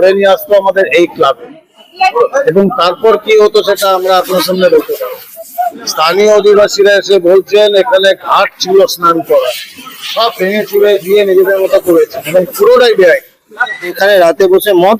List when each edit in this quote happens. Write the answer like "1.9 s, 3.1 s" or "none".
5.8 s, 13.9 s